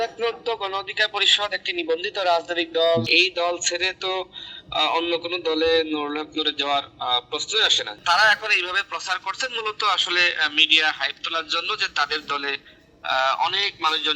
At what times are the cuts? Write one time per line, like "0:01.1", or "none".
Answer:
0:03.0
0:07.9

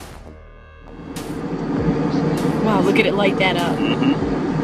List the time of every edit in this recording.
none

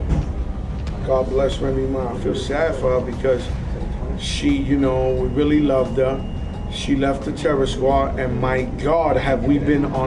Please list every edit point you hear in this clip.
none

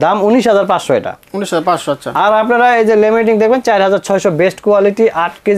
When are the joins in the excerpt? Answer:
none

